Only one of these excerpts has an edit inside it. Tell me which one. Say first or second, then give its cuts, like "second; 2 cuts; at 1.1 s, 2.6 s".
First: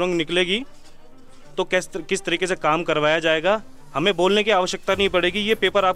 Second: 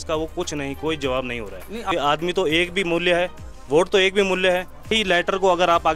second; 2 cuts; at 1.9 s, 4.9 s